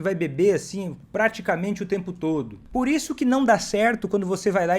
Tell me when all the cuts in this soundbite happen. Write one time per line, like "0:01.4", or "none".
0:01.0
0:02.6